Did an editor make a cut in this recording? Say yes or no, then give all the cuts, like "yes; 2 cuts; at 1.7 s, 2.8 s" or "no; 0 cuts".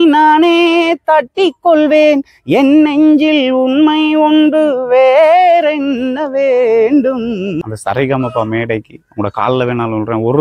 yes; 1 cut; at 7.6 s